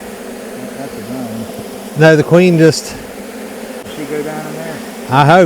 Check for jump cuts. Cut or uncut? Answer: cut